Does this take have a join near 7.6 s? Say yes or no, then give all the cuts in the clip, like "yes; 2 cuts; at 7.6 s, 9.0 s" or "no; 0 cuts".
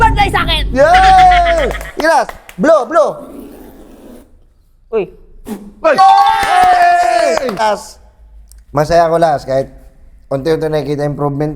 yes; 1 cut; at 7.6 s